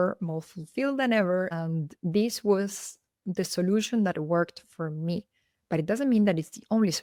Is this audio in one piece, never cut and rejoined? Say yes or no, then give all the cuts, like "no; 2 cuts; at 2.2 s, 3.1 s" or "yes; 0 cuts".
yes; 0 cuts